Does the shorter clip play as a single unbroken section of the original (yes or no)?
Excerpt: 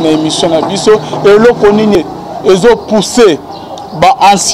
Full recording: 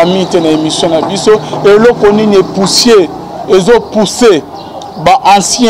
no